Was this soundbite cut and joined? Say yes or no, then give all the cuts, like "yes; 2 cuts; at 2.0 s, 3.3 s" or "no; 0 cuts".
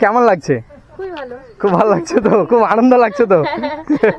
no; 0 cuts